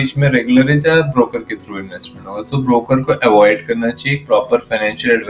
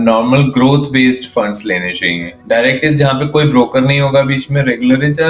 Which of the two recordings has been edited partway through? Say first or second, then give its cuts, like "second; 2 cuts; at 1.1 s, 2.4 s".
second; 1 cut; at 2.4 s